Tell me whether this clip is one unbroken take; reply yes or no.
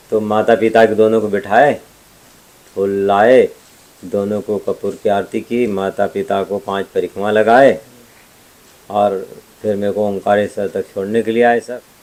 yes